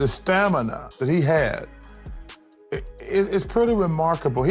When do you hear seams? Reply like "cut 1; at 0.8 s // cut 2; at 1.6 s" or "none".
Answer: none